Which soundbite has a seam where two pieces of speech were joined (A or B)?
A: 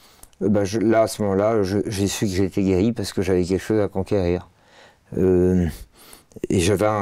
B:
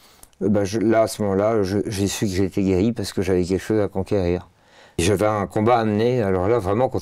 B